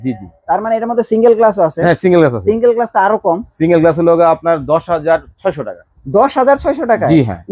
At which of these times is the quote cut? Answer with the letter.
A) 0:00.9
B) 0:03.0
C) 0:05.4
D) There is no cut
D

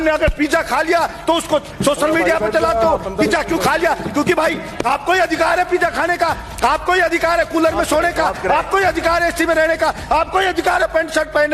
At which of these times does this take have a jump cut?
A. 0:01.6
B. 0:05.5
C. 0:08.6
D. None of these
D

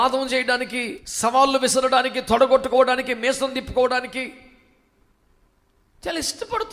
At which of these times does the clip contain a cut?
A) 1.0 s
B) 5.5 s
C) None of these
A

